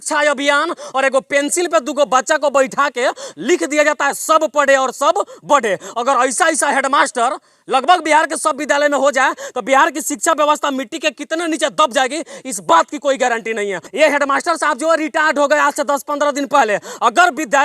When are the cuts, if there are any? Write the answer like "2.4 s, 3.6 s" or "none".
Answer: none